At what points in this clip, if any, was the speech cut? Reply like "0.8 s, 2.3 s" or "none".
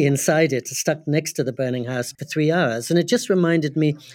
2.2 s

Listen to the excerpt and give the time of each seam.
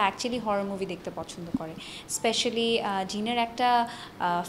none

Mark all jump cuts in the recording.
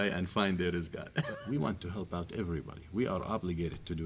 1.3 s

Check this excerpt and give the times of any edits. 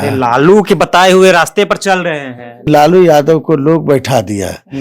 2.7 s

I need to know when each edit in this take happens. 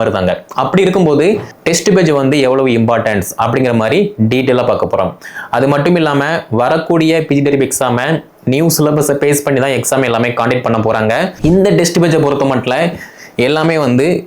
1.5 s, 11.3 s

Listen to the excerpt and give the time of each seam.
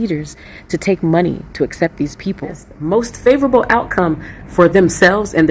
2.4 s

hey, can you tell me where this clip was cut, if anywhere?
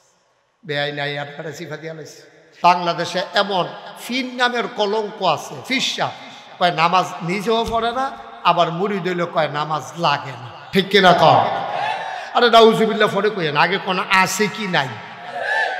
2.4 s

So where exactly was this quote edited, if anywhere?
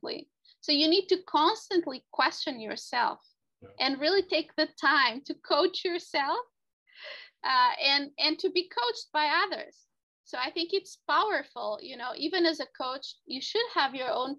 none

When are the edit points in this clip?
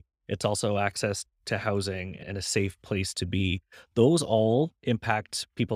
2.2 s, 4.8 s

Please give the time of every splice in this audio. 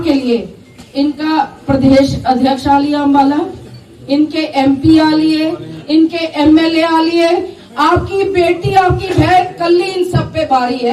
none

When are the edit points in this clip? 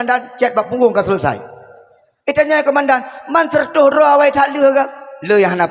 none

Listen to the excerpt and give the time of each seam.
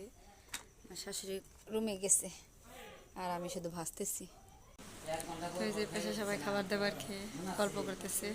4.9 s

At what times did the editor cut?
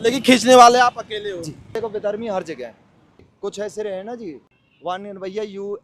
1.7 s, 3.2 s, 4.5 s

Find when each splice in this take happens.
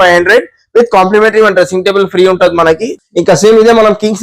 2.9 s

